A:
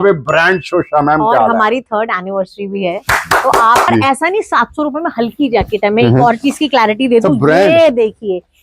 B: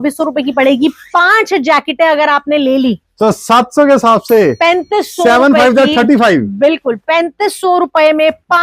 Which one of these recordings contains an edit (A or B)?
A